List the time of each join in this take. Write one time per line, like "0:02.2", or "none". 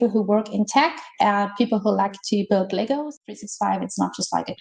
0:03.1